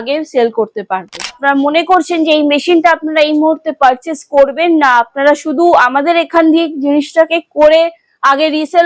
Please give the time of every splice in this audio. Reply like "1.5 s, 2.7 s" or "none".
1.4 s